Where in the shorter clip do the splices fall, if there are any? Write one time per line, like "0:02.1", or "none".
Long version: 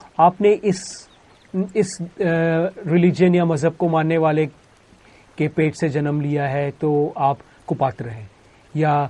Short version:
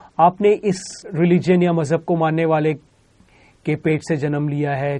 0:01.1